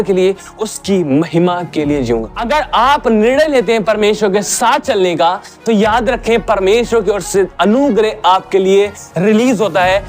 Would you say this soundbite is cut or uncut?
cut